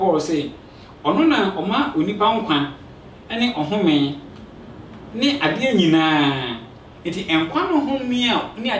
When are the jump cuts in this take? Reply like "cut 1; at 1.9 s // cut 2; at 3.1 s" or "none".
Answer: none